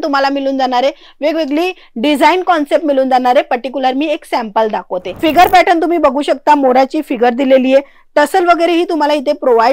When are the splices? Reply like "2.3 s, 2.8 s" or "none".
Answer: 5.0 s